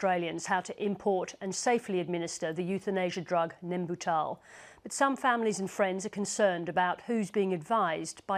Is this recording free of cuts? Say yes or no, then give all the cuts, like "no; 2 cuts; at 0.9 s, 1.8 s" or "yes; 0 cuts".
no; 1 cut; at 2.0 s